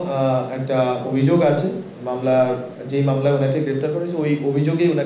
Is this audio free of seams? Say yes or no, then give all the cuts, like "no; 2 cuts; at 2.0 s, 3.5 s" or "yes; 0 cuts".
yes; 0 cuts